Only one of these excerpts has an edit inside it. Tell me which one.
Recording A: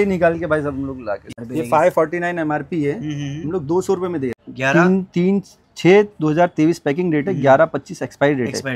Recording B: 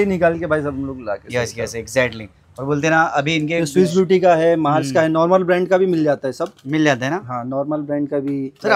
A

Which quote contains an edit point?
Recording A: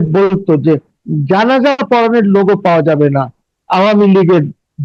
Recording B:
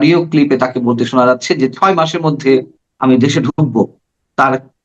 B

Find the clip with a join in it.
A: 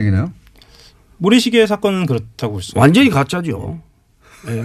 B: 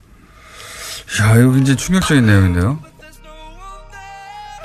B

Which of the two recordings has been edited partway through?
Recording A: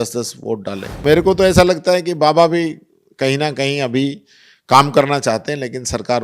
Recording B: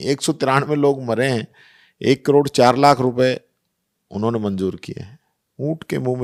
A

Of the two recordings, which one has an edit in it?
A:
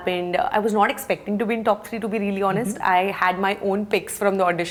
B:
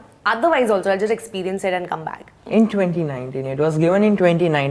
B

